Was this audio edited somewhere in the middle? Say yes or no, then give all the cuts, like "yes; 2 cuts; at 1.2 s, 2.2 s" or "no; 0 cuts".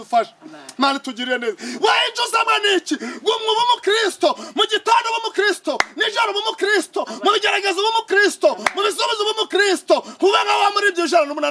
no; 0 cuts